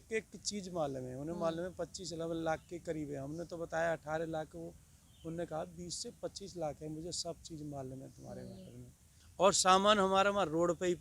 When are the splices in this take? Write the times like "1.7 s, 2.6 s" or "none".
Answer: 9.2 s